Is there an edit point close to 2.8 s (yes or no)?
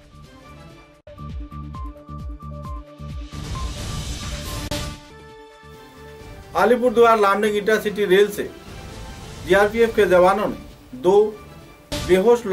no